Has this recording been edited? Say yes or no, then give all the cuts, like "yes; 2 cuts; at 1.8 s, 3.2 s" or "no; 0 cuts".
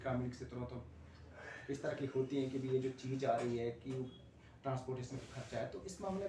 no; 0 cuts